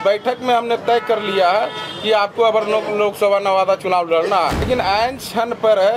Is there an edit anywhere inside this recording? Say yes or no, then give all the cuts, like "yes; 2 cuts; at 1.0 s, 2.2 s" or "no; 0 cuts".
yes; 1 cut; at 4.7 s